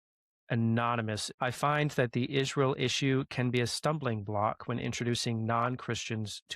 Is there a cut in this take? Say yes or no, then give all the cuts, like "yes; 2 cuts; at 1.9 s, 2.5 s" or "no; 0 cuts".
yes; 1 cut; at 1.2 s